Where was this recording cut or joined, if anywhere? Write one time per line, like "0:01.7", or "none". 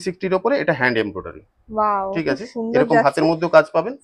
none